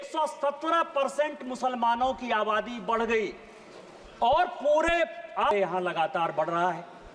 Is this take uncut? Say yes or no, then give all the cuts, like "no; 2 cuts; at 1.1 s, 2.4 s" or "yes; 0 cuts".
no; 1 cut; at 5.5 s